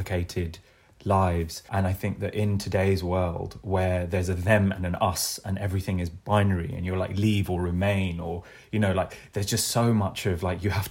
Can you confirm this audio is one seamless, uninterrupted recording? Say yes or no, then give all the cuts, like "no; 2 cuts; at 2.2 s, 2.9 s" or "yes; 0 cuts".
no; 1 cut; at 1.6 s